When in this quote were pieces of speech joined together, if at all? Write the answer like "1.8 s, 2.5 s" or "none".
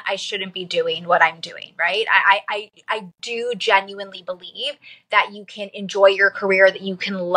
none